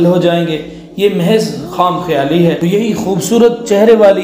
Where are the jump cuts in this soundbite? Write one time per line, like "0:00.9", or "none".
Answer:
0:02.6